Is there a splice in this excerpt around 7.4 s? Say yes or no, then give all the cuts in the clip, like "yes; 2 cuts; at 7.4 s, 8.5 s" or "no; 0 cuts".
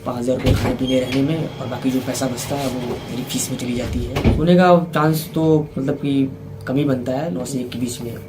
yes; 2 cuts; at 4.3 s, 7.4 s